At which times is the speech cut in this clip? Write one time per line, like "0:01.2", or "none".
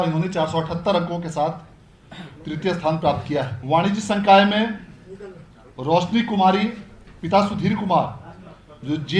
0:03.6